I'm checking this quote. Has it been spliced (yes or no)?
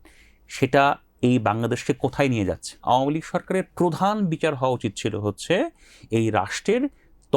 yes